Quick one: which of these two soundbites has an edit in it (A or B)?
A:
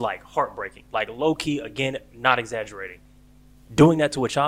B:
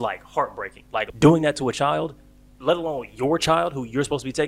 B